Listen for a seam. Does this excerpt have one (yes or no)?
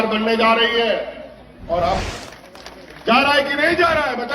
yes